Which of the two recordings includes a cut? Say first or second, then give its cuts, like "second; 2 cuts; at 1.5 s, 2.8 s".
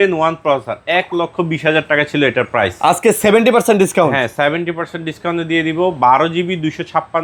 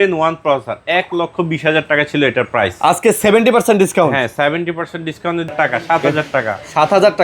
second; 1 cut; at 5.5 s